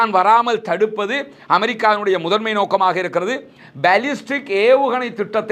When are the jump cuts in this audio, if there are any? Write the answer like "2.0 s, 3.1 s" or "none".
none